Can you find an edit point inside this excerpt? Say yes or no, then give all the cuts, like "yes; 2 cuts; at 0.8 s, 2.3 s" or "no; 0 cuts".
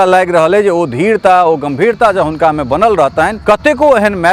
yes; 1 cut; at 3.4 s